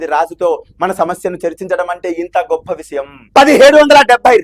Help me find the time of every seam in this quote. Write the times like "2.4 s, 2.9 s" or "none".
3.2 s